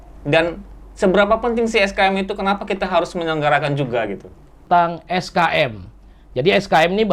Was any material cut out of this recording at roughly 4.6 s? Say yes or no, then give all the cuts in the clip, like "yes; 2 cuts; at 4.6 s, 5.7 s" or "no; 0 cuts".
yes; 1 cut; at 4.6 s